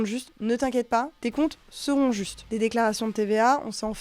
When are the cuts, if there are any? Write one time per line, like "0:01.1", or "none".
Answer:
0:01.2
0:02.4